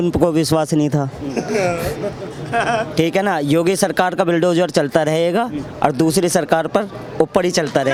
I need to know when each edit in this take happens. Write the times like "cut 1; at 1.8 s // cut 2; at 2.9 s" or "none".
none